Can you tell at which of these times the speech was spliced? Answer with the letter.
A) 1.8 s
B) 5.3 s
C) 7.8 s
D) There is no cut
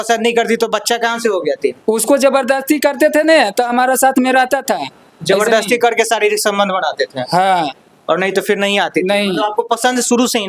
A